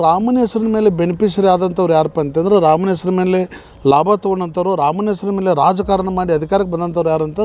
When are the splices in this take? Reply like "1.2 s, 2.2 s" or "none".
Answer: none